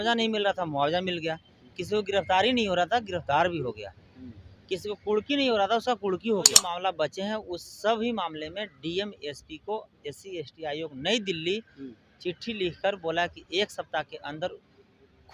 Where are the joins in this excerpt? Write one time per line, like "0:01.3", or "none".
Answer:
0:06.6